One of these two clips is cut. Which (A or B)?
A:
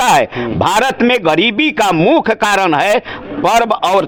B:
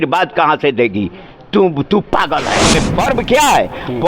B